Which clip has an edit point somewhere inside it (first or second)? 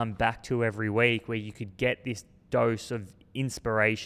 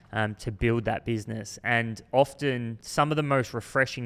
second